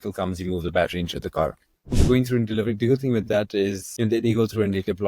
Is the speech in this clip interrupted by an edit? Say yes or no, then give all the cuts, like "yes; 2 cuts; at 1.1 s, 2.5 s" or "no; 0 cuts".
yes; 2 cuts; at 2.0 s, 3.8 s